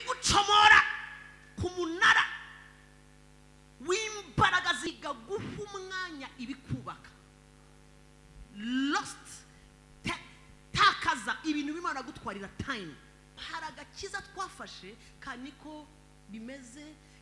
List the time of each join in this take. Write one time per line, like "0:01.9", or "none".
0:04.9
0:13.4